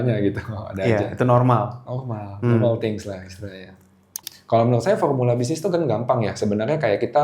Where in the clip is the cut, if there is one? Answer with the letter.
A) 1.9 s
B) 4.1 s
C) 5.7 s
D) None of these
B